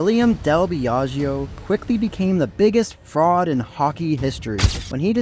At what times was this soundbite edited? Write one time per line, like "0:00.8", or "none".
0:01.5
0:02.5